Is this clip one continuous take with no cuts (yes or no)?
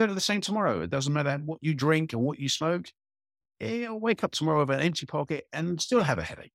yes